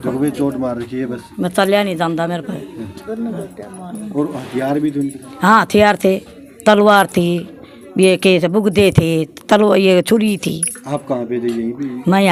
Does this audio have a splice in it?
no; 0 cuts

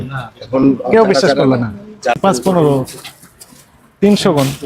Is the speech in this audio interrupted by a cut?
yes; 1 cut; at 2.2 s

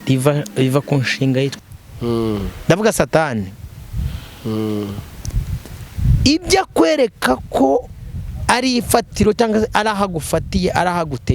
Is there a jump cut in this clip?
yes; 1 cut; at 1.5 s

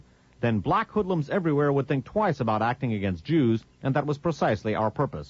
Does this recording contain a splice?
yes; 1 cut; at 3.6 s

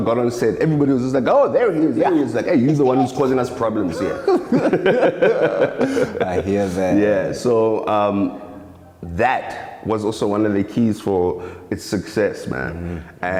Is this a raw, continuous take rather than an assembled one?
yes; 0 cuts

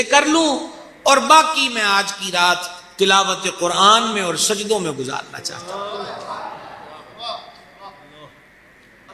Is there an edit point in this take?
no; 0 cuts

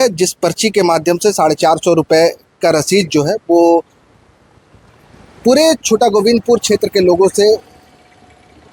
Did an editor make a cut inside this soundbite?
no; 0 cuts

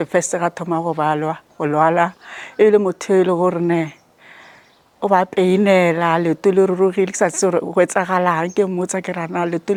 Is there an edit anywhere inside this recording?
no; 0 cuts

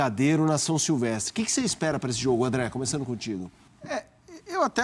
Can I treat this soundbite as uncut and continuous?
no; 1 cut; at 3.6 s

